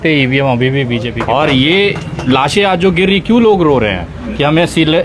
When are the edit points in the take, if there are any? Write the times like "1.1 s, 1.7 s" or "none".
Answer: 1.1 s

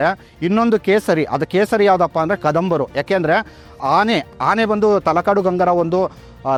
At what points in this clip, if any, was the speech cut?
none

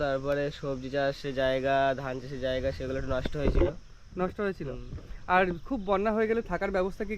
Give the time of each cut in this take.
none

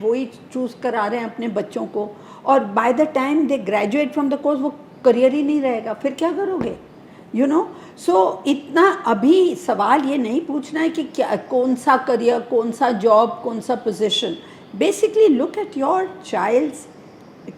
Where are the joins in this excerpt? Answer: none

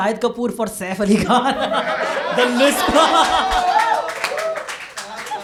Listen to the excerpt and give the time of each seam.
none

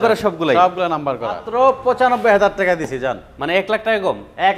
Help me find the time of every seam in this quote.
1.4 s

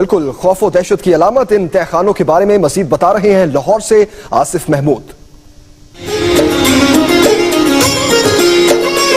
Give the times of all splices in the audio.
6.1 s

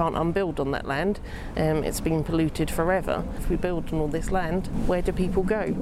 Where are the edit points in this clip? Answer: 3.4 s, 4.7 s

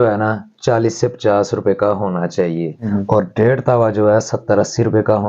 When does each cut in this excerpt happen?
2.8 s

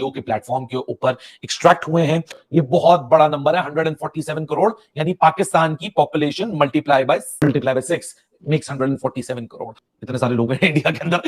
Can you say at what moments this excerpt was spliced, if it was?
none

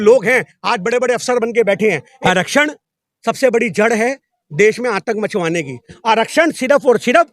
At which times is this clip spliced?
2.1 s

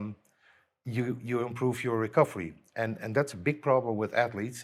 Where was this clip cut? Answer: none

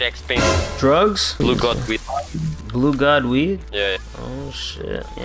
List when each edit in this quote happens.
1.3 s

